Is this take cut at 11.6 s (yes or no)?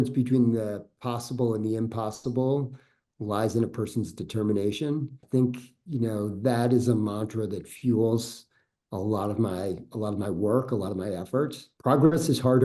yes